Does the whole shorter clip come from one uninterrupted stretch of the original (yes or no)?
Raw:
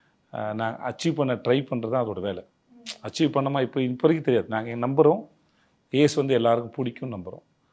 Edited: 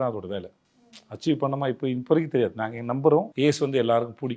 no